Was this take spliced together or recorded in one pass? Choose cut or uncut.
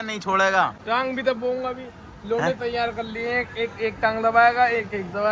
uncut